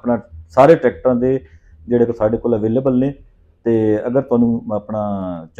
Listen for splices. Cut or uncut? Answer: uncut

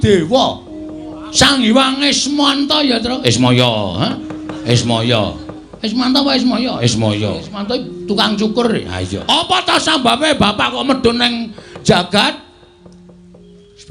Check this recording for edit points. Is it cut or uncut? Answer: cut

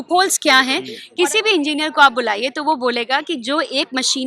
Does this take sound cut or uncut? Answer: cut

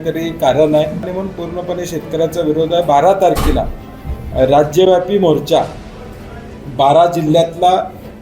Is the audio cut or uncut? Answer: cut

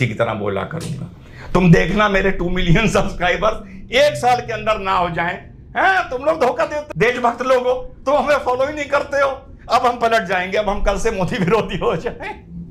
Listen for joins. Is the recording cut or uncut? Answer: cut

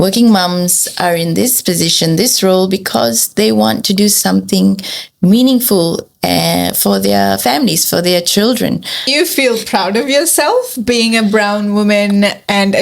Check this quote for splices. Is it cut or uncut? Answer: cut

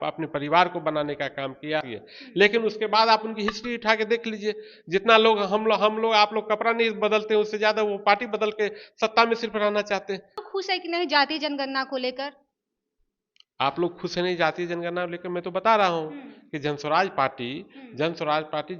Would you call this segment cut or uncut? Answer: cut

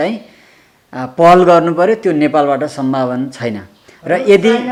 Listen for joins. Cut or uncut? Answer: uncut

